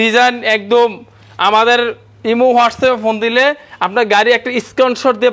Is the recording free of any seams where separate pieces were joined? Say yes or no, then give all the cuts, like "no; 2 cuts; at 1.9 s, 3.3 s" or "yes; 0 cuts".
yes; 0 cuts